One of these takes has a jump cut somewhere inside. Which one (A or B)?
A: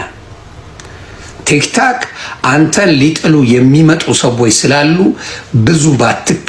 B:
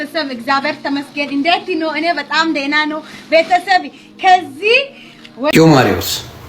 B